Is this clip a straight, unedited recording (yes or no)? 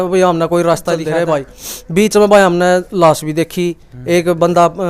no